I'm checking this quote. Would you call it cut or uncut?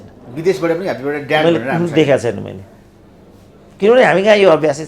uncut